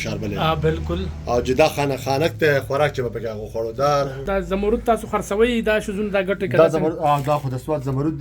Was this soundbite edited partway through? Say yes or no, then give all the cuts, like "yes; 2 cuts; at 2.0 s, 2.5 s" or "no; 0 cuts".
yes; 1 cut; at 4.2 s